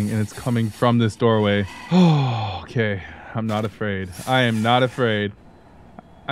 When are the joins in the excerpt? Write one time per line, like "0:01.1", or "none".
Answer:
0:01.8

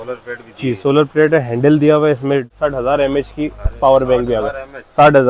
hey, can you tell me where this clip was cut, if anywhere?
0:02.5

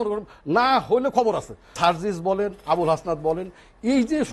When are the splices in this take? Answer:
0:01.7

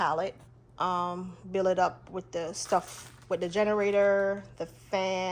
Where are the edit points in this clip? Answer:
none

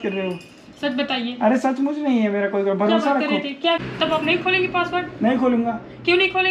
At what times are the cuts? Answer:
0:03.8

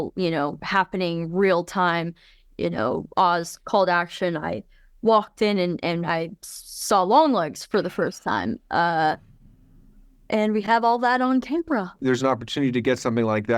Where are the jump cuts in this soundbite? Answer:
0:11.9

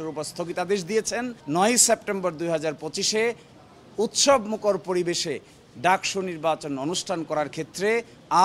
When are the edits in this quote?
0:01.4

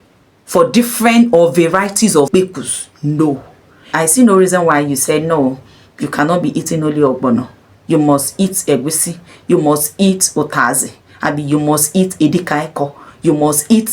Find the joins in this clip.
0:02.3
0:03.8

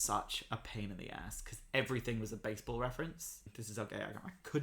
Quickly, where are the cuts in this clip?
0:03.6

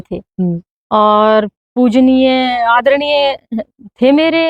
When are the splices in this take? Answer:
none

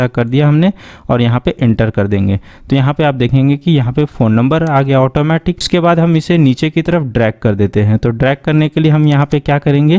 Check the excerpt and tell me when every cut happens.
none

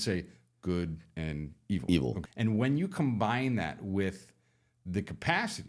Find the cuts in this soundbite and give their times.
0:02.2

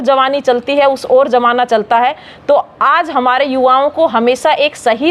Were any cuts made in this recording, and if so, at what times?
none

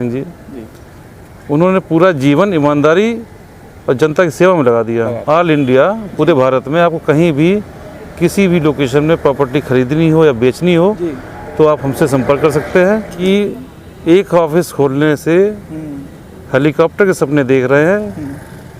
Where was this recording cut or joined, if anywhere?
0:05.2
0:13.2

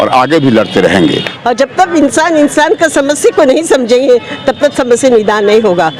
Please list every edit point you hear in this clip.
0:01.1

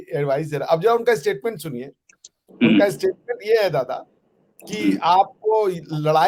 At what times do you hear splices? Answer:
none

